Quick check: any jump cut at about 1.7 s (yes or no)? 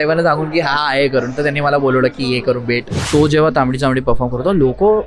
no